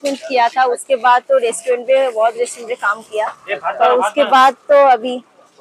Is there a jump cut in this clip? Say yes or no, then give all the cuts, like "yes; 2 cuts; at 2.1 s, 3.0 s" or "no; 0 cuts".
no; 0 cuts